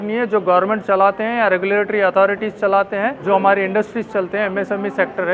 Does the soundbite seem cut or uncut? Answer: cut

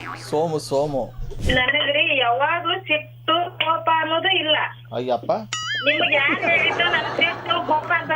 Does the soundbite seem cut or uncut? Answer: cut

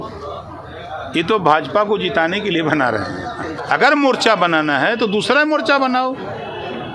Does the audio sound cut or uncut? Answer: cut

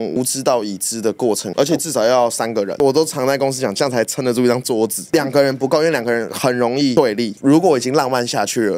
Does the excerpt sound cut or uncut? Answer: cut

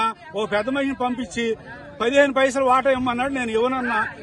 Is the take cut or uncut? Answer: uncut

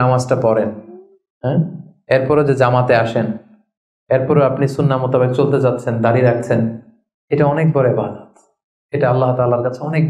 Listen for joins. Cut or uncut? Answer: uncut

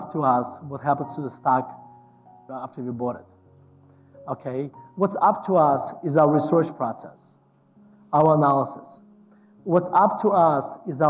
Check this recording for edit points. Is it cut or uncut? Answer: cut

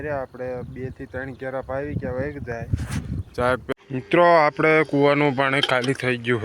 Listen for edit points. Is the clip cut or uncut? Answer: cut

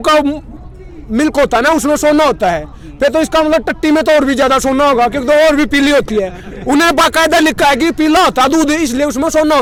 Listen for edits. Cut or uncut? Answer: uncut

